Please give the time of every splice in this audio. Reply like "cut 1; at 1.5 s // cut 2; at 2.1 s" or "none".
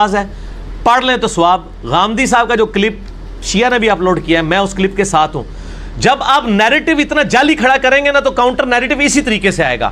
none